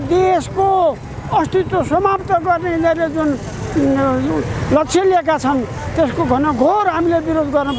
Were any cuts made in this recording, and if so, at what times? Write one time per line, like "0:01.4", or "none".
none